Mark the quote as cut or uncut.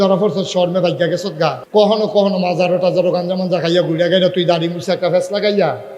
cut